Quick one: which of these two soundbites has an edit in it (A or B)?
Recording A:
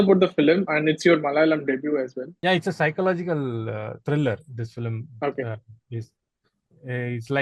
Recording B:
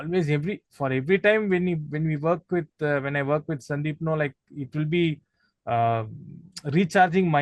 A